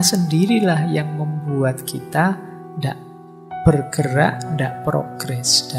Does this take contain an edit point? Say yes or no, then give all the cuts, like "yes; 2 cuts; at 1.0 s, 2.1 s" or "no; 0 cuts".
no; 0 cuts